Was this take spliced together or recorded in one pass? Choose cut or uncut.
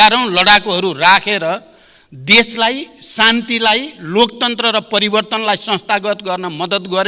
uncut